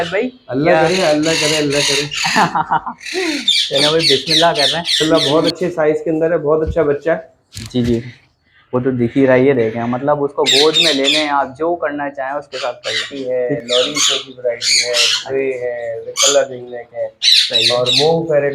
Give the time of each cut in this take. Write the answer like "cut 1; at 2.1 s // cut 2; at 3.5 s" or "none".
cut 1; at 5.0 s // cut 2; at 13.1 s